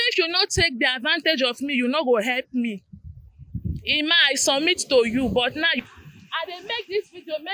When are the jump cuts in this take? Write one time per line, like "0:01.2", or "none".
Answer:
0:05.7

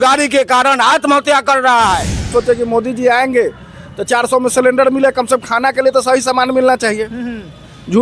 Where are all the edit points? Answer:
0:02.3

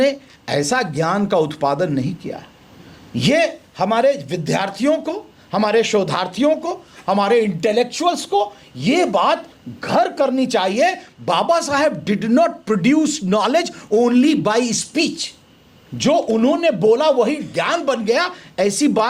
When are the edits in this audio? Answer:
none

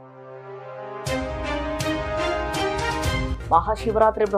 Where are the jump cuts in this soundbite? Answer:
0:03.3

